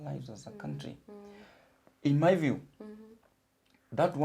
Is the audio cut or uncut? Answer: uncut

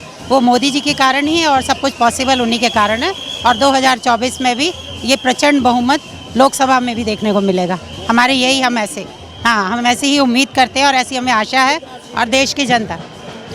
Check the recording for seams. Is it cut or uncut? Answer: uncut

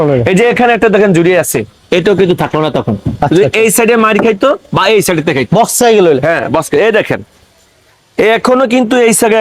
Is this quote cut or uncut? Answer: uncut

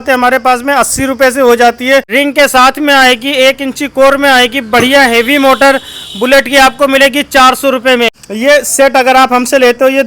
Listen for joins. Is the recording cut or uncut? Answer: cut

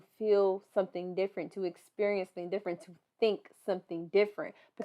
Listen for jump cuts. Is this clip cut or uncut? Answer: uncut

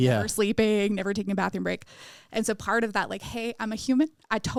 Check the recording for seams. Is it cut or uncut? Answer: uncut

